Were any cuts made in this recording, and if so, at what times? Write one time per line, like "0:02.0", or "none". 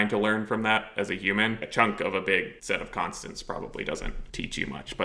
0:01.6
0:02.6
0:04.2